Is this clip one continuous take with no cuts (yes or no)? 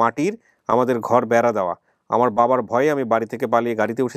yes